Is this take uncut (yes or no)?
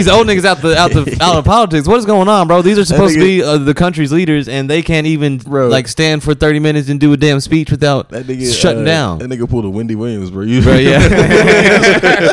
yes